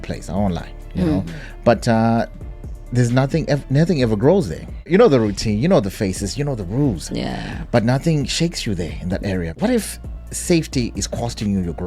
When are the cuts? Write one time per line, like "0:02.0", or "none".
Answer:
0:04.9
0:09.5